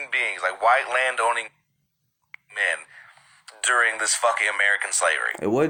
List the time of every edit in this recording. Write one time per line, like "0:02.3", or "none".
none